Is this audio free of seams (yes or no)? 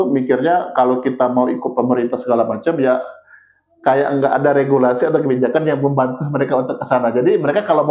yes